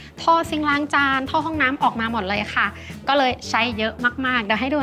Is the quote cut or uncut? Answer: uncut